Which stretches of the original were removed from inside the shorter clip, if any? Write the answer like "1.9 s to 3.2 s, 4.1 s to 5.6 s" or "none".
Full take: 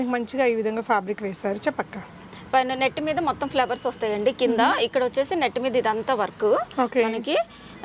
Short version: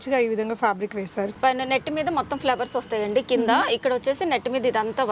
1.6 s to 2.4 s